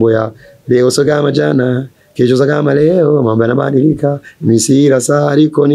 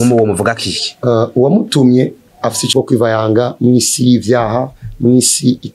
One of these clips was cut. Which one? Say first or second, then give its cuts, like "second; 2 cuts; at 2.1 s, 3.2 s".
second; 1 cut; at 2.6 s